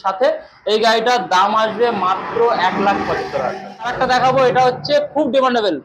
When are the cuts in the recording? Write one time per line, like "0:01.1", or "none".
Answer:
0:03.9